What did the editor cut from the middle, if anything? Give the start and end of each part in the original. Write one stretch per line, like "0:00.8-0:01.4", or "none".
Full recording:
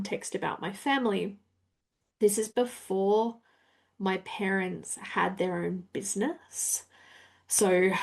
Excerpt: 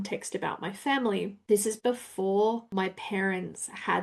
0:01.4-0:02.1
0:03.4-0:03.9